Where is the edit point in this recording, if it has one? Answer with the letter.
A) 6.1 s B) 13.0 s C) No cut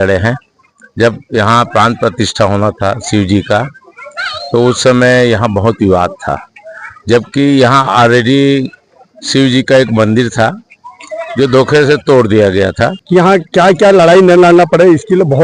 B